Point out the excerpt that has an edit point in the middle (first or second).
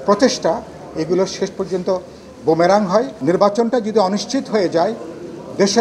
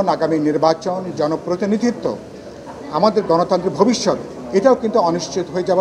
first